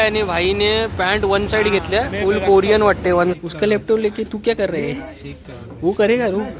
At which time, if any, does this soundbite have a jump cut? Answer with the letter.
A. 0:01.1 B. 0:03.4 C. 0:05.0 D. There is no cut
B